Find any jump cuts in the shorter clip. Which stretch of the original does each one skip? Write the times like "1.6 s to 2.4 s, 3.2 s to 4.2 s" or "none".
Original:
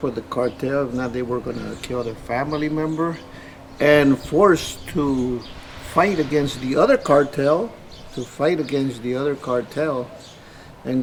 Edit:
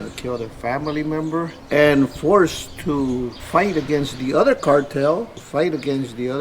3.2 s to 3.7 s, 5.5 s to 5.8 s, 7.8 s to 8.2 s